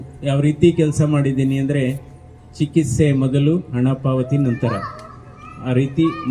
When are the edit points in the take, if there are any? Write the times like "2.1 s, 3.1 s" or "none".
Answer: none